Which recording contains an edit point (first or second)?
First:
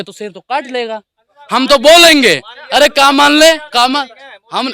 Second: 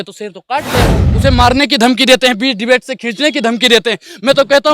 second